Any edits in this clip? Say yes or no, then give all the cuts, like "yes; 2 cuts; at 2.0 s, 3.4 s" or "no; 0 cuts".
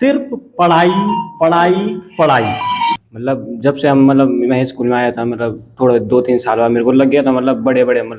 yes; 1 cut; at 3.1 s